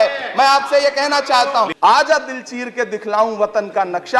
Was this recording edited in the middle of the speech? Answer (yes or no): yes